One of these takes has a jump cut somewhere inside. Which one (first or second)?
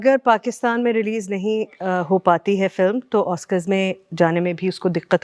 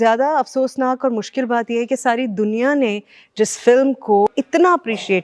second